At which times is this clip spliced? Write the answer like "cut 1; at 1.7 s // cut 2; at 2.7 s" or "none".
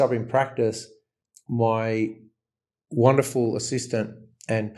none